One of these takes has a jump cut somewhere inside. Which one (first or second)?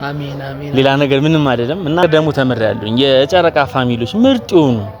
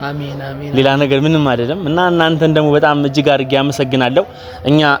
first